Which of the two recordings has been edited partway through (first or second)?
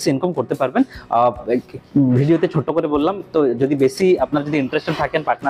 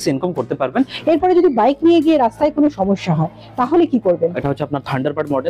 second